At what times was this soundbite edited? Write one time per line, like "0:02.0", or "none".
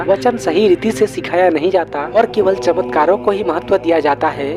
none